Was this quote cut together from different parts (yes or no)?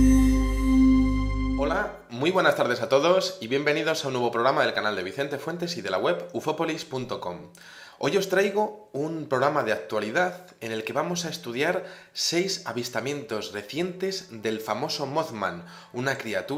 no